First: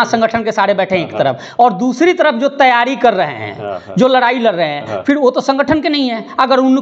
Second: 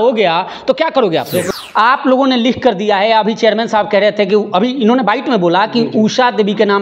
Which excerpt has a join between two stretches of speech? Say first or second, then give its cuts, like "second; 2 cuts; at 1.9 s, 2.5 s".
second; 1 cut; at 1.5 s